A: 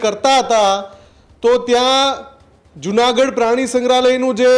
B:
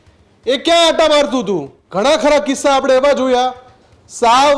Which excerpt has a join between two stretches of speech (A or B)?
B